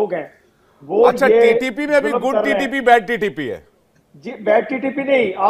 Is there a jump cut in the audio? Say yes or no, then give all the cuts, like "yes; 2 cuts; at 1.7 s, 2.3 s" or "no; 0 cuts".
no; 0 cuts